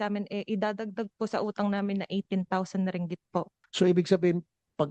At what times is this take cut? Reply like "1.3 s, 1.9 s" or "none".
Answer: 3.6 s